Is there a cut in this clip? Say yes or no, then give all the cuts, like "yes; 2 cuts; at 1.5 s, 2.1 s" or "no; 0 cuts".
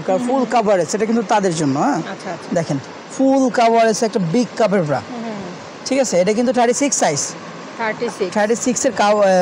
no; 0 cuts